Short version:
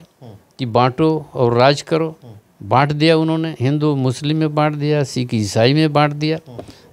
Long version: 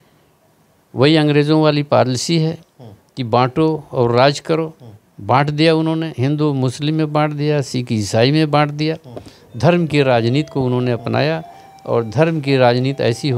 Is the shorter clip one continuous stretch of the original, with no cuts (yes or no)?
yes